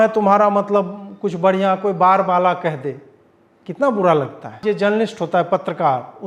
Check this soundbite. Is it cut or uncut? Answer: cut